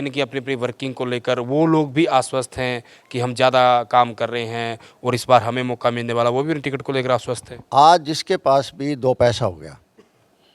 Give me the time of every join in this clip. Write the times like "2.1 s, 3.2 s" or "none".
7.5 s